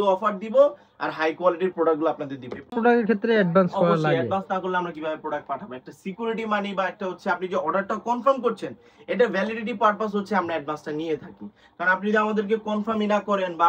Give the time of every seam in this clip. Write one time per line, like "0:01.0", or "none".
0:02.7